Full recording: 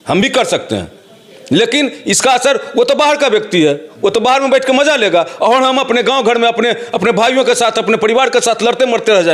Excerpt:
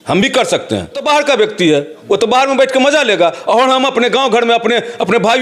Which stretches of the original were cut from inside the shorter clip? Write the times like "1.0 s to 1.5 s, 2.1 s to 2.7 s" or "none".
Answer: 1.0 s to 2.9 s